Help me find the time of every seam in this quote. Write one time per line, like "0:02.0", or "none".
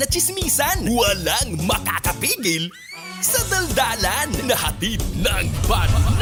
none